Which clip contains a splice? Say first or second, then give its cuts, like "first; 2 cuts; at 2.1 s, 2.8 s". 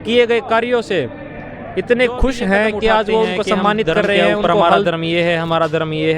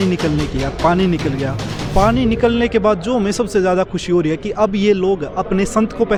first; 1 cut; at 4.4 s